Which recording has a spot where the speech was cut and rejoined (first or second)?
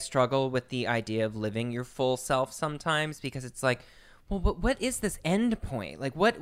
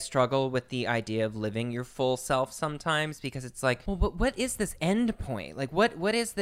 second